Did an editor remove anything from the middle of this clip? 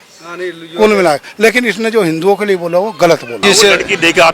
yes; 1 cut; at 3.4 s

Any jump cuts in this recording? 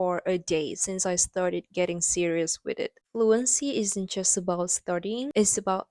yes; 1 cut; at 3.0 s

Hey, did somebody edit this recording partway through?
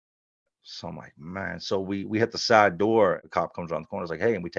yes; 1 cut; at 3.2 s

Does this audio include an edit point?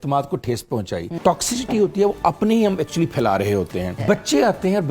yes; 2 cuts; at 1.2 s, 4.0 s

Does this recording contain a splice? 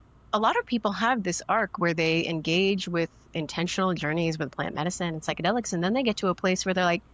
no; 0 cuts

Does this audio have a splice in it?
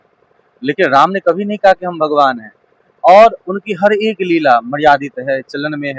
no; 0 cuts

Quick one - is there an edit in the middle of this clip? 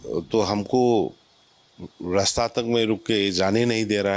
no; 0 cuts

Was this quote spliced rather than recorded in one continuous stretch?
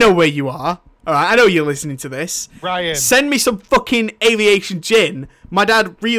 no; 0 cuts

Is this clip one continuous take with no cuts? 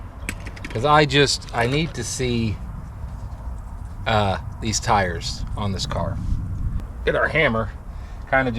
no; 1 cut; at 6.7 s

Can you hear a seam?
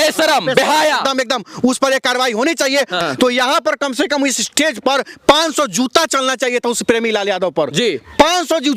yes; 1 cut; at 3.0 s

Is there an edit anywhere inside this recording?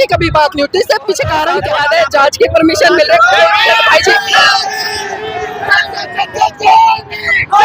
yes; 2 cuts; at 1.6 s, 4.5 s

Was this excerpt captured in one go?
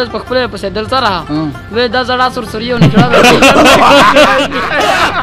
yes; 0 cuts

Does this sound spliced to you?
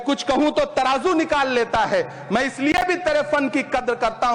no; 0 cuts

